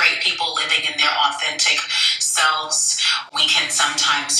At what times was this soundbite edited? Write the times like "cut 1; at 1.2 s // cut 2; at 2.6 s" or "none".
none